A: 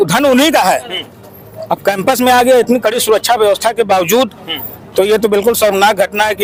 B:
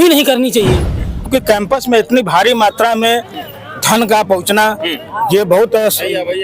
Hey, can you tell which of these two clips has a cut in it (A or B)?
B